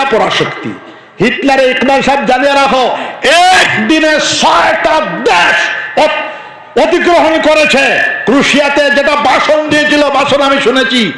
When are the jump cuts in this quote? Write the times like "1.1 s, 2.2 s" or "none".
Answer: none